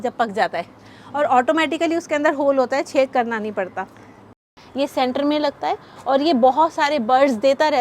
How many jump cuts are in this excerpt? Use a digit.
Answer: 1